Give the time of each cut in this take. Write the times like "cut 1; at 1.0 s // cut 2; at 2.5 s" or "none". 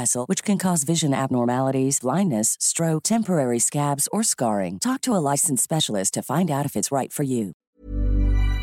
cut 1; at 7.6 s